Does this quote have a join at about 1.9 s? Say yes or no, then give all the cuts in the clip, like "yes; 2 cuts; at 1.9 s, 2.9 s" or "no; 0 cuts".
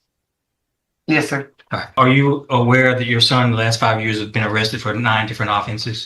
yes; 1 cut; at 1.9 s